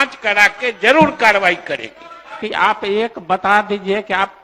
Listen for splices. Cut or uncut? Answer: cut